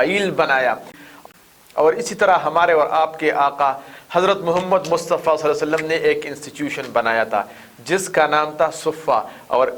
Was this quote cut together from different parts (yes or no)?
yes